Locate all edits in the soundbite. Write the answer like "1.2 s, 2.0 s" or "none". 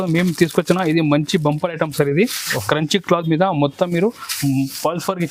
none